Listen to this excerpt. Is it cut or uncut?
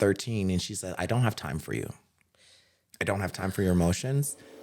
uncut